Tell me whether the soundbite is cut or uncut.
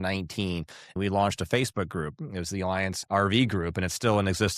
cut